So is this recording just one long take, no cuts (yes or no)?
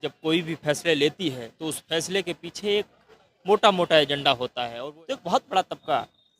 no